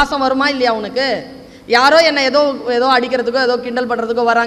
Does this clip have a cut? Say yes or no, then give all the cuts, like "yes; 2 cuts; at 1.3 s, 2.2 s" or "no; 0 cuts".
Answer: no; 0 cuts